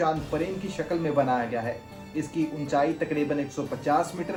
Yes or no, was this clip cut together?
no